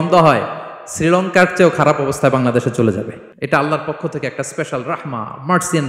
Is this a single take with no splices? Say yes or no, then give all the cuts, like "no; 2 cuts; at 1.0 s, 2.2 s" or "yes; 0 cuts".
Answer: no; 1 cut; at 3.2 s